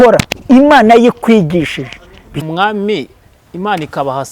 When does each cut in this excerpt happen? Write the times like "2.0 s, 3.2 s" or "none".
2.4 s

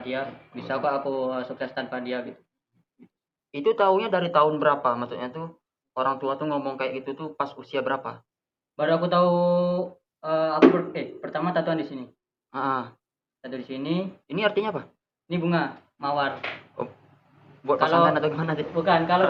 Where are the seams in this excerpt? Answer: none

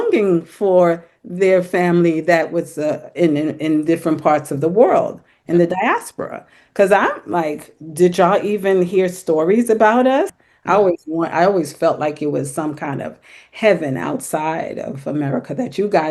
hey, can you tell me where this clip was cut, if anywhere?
10.4 s

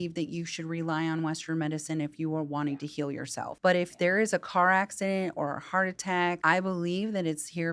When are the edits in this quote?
3.5 s, 6.4 s

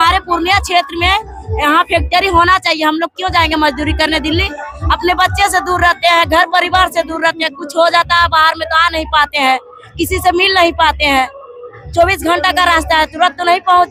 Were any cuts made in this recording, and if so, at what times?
none

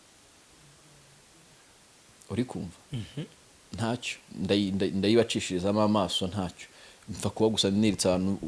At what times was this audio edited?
none

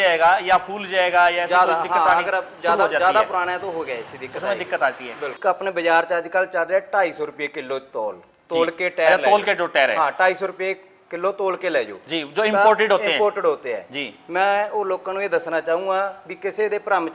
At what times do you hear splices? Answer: 5.4 s

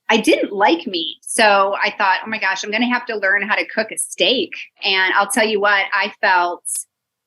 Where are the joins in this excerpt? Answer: 1.2 s, 4.9 s

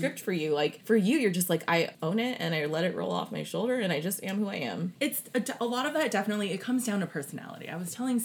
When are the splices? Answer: 0.8 s, 1.9 s, 4.9 s

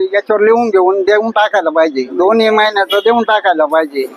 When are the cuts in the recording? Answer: 2.1 s

